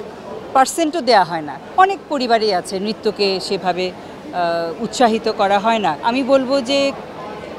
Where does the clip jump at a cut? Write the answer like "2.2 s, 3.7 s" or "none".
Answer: 1.6 s, 6.0 s